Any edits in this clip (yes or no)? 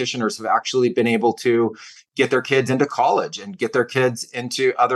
no